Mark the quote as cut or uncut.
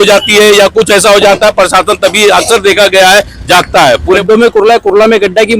cut